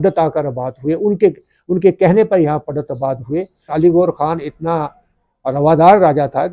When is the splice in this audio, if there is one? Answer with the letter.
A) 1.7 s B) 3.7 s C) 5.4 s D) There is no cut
B